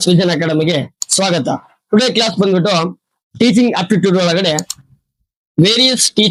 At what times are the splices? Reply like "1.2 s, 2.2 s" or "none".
none